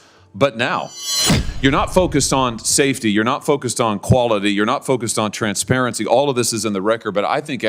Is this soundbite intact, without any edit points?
no; 1 cut; at 1.4 s

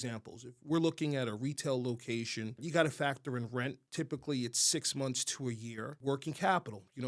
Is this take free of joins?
no; 3 cuts; at 2.6 s, 3.8 s, 5.9 s

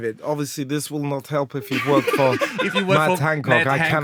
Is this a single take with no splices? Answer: yes; 0 cuts

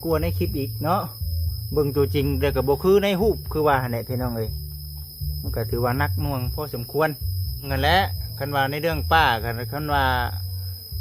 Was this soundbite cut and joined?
yes; 1 cut; at 7.7 s

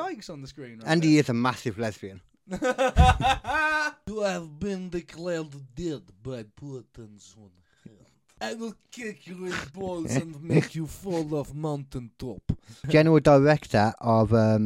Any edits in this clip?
yes; 3 cuts; at 4.0 s, 8.4 s, 12.8 s

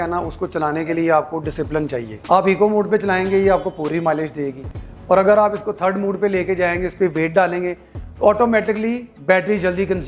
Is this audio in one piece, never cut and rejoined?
yes; 0 cuts

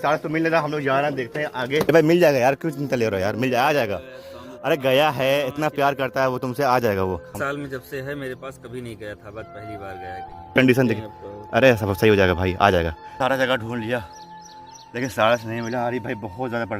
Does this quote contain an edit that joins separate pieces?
yes; 4 cuts; at 1.9 s, 7.3 s, 10.5 s, 13.1 s

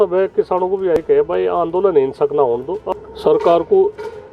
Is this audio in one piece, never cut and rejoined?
no; 1 cut; at 2.9 s

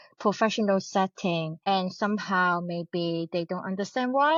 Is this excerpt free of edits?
yes; 0 cuts

